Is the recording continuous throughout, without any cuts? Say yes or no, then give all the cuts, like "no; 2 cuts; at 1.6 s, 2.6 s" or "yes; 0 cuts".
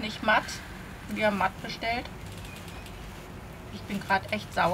yes; 0 cuts